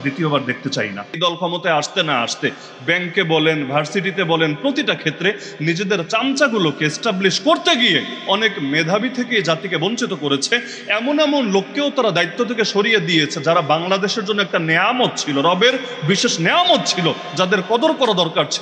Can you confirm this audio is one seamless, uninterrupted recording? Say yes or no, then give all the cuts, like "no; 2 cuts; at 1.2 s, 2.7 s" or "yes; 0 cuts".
no; 1 cut; at 1.2 s